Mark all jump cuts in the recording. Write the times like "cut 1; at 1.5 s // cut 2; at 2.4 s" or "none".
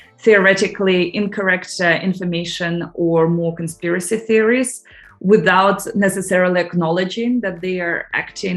none

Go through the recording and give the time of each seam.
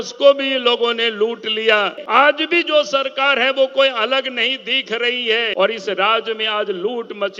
cut 1; at 2.0 s // cut 2; at 5.5 s

